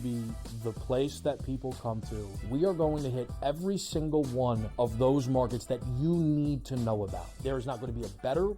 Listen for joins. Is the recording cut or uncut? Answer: cut